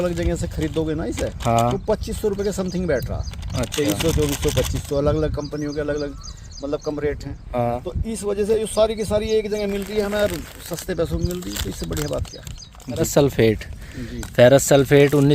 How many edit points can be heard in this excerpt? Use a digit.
1